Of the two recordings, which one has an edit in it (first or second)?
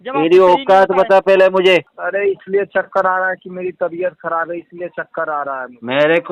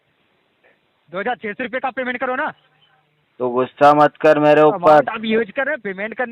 first